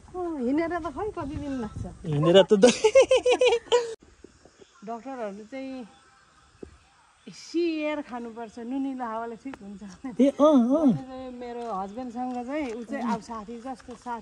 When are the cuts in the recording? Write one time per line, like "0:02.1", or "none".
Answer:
0:04.0